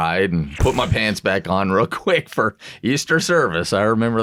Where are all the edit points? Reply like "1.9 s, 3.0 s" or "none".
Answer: none